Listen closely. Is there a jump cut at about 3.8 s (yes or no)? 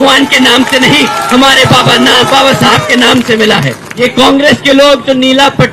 yes